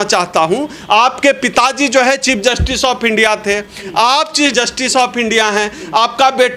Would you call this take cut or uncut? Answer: cut